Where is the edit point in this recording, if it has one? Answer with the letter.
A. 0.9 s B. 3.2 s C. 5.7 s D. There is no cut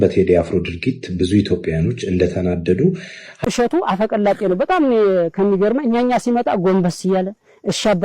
B